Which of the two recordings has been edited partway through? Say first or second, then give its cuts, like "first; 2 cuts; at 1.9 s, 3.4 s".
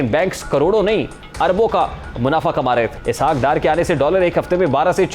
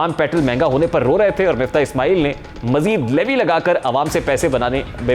first; 1 cut; at 3.0 s